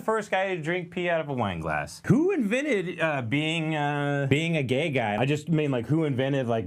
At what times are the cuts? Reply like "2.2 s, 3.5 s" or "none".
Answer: 2.0 s, 4.3 s, 5.2 s